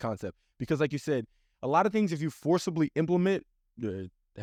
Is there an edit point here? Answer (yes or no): no